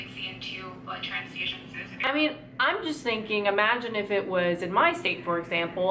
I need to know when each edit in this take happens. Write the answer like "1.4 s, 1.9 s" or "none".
2.1 s